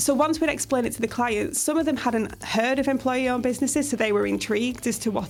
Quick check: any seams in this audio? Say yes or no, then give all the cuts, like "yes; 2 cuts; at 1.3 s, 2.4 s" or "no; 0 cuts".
no; 0 cuts